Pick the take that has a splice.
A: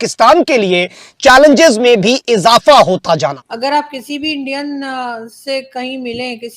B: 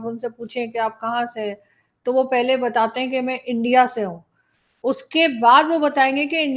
A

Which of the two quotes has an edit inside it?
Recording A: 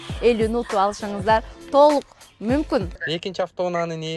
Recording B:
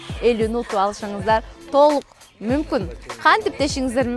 A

